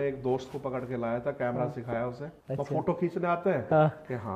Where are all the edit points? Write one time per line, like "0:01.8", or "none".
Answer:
0:02.3